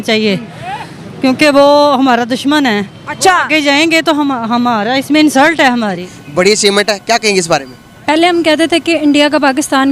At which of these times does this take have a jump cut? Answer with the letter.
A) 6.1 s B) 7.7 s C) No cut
A